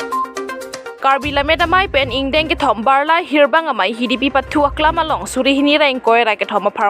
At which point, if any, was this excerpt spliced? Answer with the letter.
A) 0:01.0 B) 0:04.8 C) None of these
A